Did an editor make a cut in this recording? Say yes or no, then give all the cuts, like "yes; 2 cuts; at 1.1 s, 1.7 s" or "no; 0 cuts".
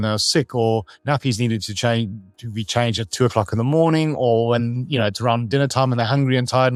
no; 0 cuts